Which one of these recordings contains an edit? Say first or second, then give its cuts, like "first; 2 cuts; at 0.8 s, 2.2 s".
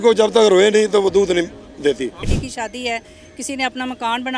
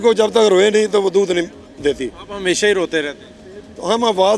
first; 1 cut; at 2.3 s